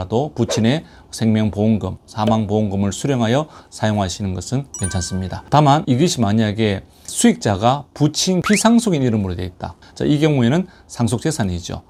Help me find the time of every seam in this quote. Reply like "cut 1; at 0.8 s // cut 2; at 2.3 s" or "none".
none